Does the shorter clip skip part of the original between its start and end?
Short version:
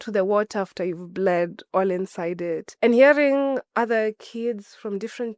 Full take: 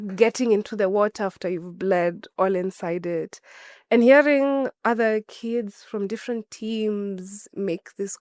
yes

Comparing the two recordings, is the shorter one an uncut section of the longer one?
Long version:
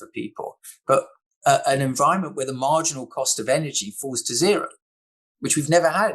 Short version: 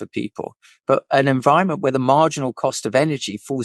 no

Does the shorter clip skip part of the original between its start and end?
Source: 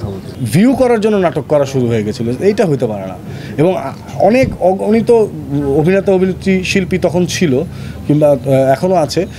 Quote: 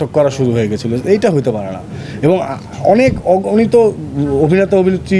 no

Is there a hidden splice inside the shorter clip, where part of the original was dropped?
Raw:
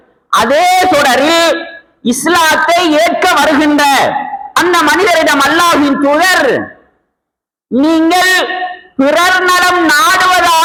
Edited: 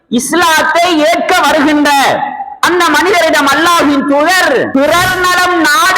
yes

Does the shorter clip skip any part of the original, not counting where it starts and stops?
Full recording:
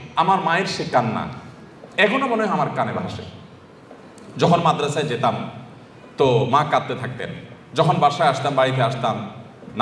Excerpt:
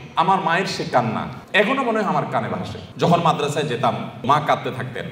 yes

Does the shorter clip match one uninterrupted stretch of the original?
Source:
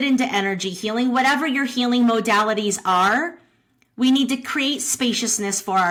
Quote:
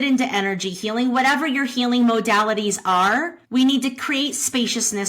no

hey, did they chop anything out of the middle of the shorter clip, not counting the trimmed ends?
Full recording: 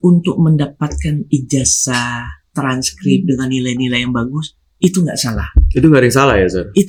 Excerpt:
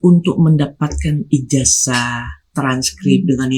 no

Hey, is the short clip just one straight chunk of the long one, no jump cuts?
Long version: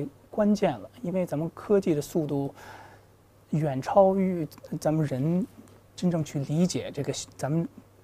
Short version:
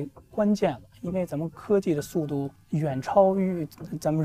no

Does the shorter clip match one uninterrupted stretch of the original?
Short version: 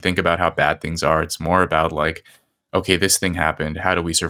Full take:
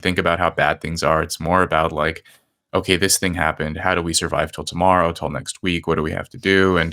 yes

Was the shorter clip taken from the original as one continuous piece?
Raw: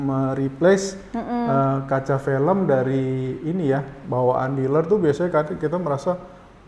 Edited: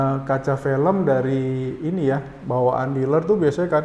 yes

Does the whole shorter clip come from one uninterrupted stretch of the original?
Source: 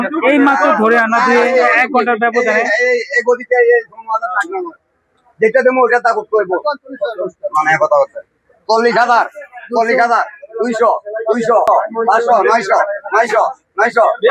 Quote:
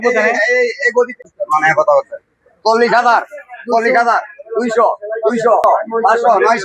no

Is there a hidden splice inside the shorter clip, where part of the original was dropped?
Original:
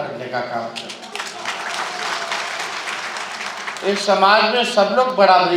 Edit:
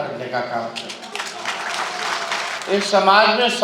yes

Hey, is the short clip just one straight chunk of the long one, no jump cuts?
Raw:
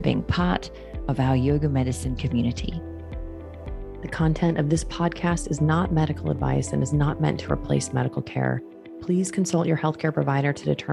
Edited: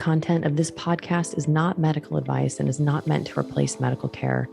yes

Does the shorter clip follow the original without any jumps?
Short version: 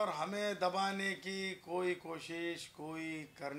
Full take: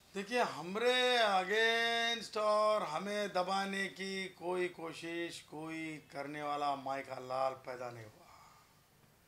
yes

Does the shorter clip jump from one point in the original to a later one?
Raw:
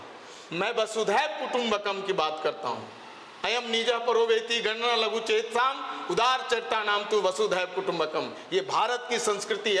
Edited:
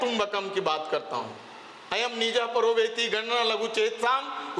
no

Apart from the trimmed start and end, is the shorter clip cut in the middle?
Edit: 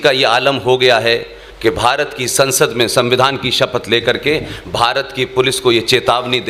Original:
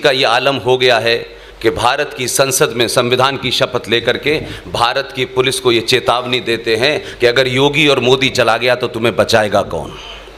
no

